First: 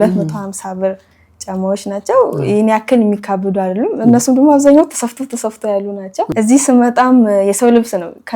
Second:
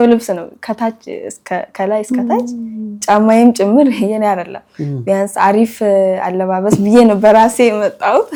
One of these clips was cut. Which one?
first; 1 cut; at 6.3 s

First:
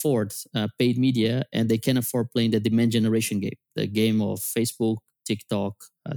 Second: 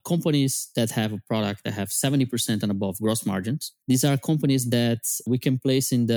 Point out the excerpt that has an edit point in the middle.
second; 2 cuts; at 3.7 s, 5.3 s

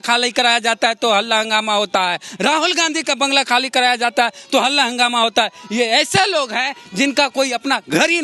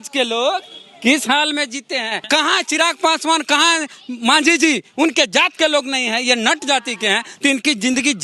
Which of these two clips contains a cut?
second; 1 cut; at 2.2 s

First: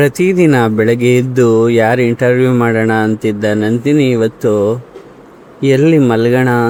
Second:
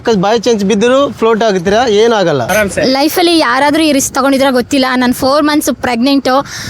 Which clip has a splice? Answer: second; 1 cut; at 2.4 s

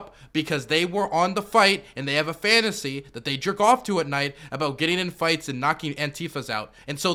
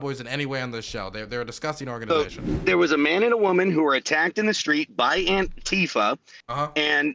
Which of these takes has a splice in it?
second; 1 cut; at 2.6 s

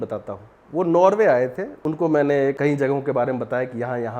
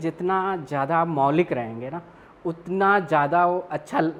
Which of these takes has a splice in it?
first; 2 cuts; at 1.7 s, 2.6 s

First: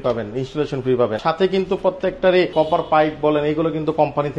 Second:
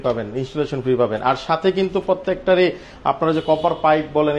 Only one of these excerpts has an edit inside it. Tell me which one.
first; 2 cuts; at 1.2 s, 2.5 s

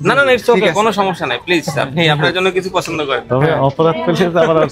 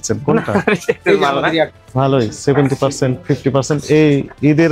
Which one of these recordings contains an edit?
second; 1 cut; at 1.8 s

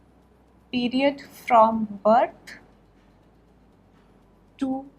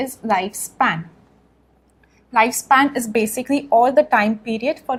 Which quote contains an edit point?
first; 1 cut; at 1.0 s

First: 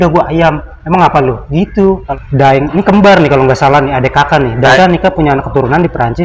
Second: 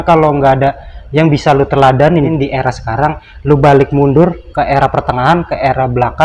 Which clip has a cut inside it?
first; 2 cuts; at 2.1 s, 4.8 s

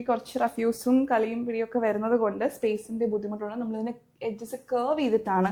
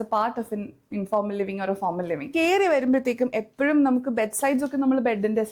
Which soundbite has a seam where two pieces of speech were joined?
second; 1 cut; at 2.3 s

